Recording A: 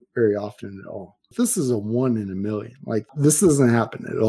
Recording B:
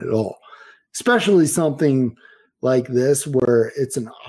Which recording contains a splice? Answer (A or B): A